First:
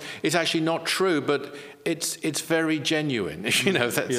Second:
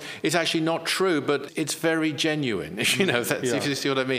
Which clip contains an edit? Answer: second; 1 cut; at 1.5 s

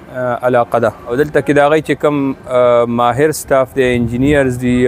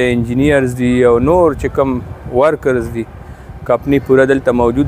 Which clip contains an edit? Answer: first; 1 cut; at 1.1 s

